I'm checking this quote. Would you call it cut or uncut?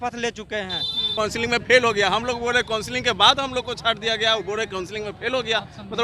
cut